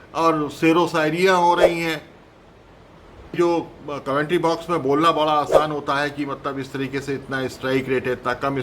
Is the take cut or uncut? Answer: cut